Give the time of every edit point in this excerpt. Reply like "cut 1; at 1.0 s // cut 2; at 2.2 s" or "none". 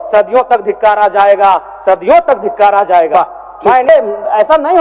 cut 1; at 3.9 s